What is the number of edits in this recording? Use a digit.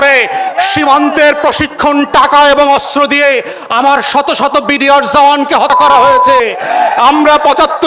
1